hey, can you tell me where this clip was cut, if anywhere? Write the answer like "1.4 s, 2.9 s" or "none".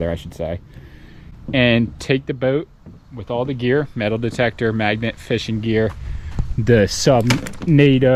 none